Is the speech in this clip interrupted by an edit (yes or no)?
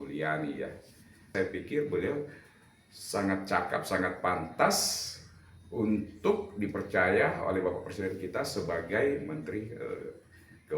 yes